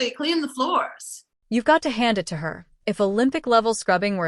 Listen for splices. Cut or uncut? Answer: uncut